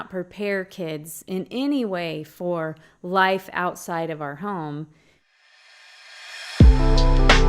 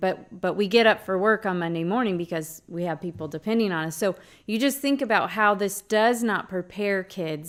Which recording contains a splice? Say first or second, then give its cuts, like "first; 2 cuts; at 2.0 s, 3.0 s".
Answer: first; 1 cut; at 5.3 s